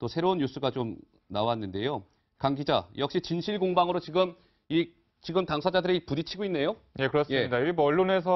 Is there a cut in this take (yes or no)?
no